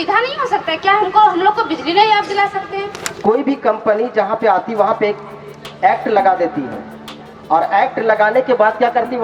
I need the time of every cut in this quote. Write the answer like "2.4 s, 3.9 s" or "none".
3.0 s

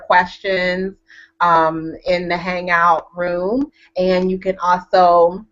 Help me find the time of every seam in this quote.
1.3 s

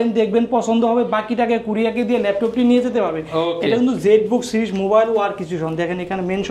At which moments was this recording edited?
none

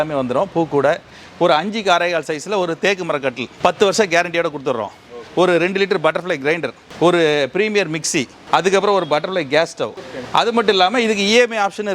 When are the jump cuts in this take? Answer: 1.2 s, 5.2 s, 9.9 s

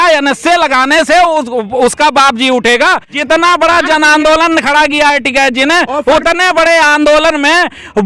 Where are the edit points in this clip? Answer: 3.1 s

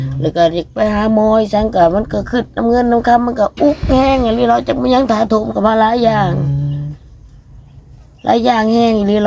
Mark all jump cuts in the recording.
none

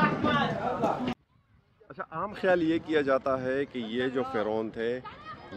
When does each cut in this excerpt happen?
1.1 s

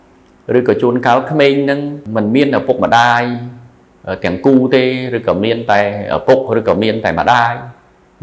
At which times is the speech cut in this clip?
2.0 s

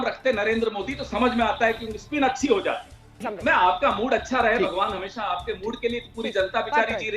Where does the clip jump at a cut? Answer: 3.3 s

